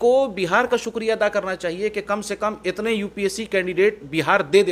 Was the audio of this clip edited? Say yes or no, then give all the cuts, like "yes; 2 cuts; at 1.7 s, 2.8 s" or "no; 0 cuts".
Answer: no; 0 cuts